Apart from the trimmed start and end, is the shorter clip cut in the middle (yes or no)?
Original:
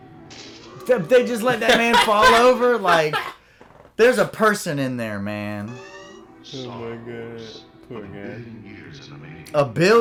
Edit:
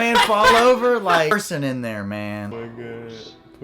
yes